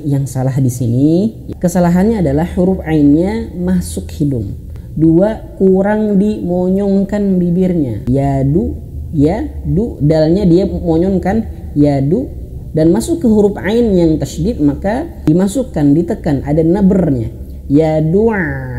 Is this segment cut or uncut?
cut